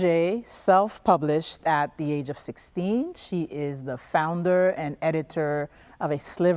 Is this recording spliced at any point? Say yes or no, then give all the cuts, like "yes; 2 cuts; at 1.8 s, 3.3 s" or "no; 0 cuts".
yes; 1 cut; at 1.8 s